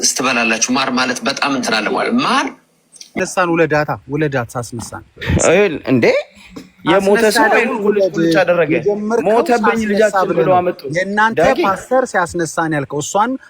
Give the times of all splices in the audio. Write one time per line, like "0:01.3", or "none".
0:03.1